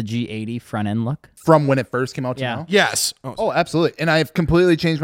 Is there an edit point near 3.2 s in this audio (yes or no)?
no